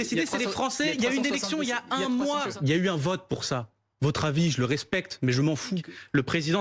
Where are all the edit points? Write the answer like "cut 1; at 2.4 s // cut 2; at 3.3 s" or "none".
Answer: cut 1; at 0.9 s // cut 2; at 2.5 s // cut 3; at 5.8 s